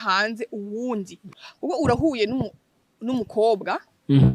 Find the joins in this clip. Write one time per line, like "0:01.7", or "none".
0:01.2